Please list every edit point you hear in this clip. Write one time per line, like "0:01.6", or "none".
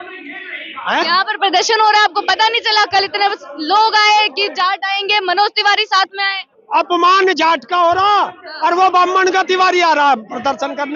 0:06.6